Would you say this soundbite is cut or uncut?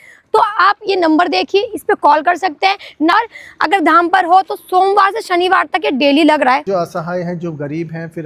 cut